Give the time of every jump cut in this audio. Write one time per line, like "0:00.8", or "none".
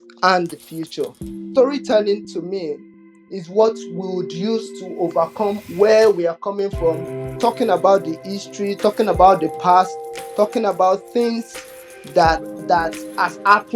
0:01.5